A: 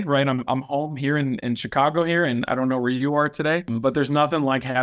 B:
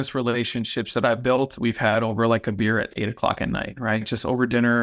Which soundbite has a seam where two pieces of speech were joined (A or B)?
A